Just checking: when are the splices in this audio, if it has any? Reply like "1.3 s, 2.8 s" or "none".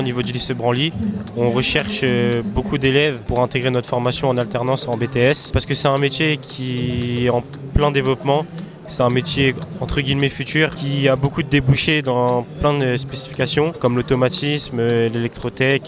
3.2 s, 5.6 s, 10.8 s, 13.8 s